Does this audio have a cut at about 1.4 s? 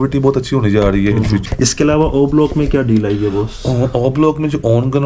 yes; 1 cut; at 1.4 s

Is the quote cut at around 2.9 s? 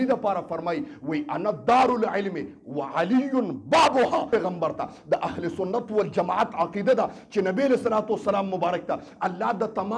no; 1 cut; at 4.3 s

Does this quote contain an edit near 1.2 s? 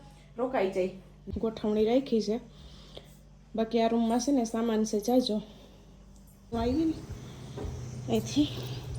yes; 2 cuts; at 1.2 s, 6.5 s

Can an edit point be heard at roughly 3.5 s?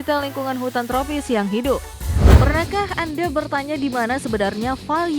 no; 1 cut; at 2.2 s

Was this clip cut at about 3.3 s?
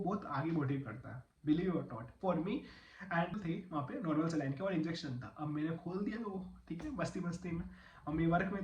yes; 1 cut; at 3.3 s

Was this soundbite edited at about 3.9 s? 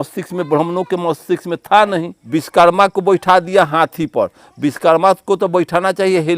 no; 1 cut; at 2.2 s

